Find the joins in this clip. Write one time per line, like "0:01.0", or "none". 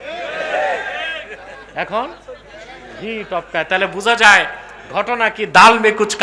none